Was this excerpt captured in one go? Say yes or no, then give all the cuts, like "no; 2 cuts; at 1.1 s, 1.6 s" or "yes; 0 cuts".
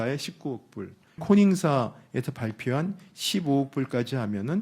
no; 1 cut; at 1.2 s